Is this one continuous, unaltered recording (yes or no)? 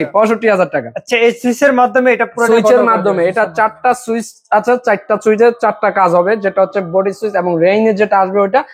yes